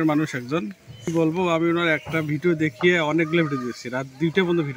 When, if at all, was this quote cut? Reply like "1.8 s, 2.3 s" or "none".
1.1 s